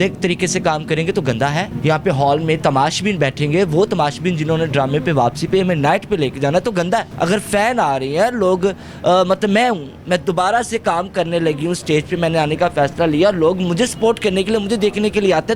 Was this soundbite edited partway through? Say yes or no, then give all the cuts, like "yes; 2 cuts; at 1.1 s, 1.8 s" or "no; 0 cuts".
no; 0 cuts